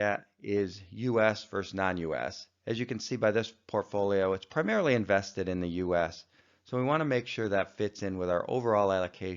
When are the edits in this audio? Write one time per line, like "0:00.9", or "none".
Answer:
0:01.2